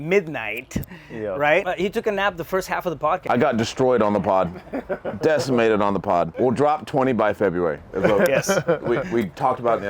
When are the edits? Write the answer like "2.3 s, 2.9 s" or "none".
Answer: 1.6 s, 3.2 s